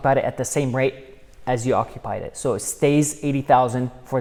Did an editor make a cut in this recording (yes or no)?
no